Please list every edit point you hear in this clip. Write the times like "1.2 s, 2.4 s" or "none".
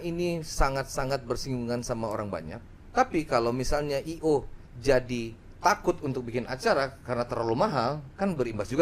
2.6 s

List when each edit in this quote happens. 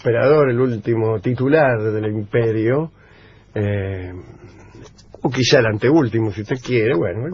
none

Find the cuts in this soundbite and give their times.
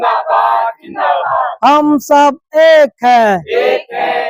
none

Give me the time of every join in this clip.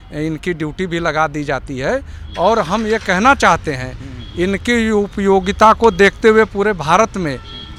none

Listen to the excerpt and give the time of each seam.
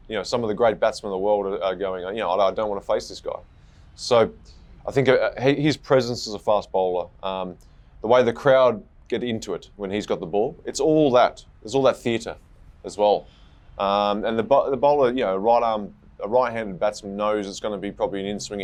none

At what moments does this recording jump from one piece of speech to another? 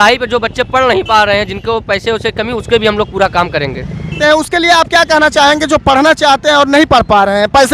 4.1 s

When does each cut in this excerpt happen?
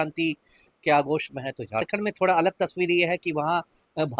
1.9 s

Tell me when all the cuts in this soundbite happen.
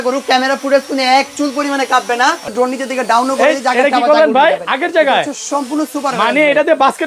2.5 s

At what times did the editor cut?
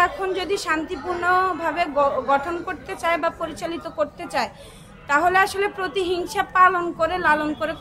none

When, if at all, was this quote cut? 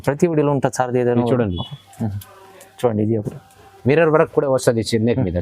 3.7 s

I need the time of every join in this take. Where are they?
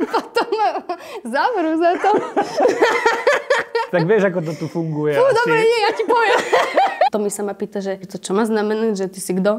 7.1 s, 8.2 s

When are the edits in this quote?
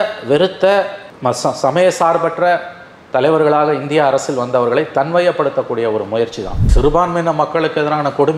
6.6 s

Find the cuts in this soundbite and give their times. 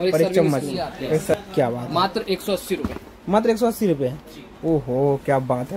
1.3 s

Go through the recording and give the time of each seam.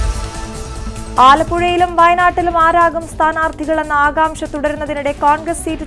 1.1 s

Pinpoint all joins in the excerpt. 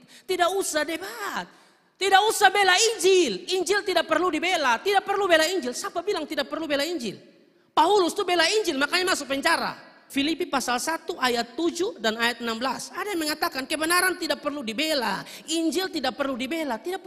10.1 s

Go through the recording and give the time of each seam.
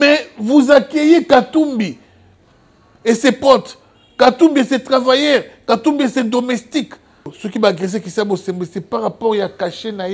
7.4 s

